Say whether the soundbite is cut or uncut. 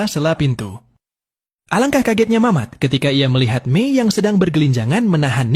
uncut